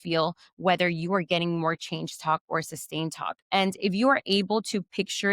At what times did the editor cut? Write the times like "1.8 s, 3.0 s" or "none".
3.3 s